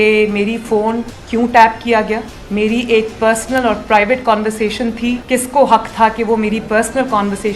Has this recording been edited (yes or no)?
yes